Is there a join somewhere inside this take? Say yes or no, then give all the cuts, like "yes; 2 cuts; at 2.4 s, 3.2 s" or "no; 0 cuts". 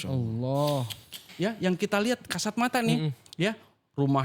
yes; 1 cut; at 1.3 s